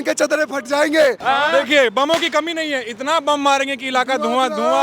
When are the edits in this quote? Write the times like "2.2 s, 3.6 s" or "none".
1.2 s